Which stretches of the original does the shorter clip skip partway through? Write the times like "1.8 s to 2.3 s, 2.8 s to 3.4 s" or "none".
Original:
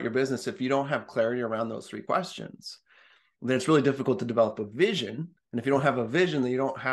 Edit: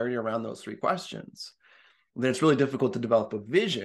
none